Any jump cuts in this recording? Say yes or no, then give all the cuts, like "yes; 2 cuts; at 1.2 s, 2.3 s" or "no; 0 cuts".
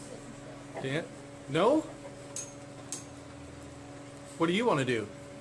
no; 0 cuts